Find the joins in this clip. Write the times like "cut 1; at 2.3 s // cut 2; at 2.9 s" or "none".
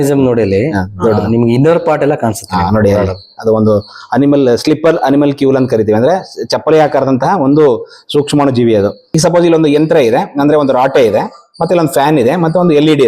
cut 1; at 9.1 s